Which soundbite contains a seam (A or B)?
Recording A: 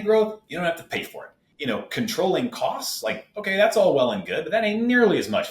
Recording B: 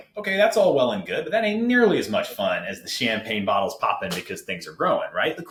A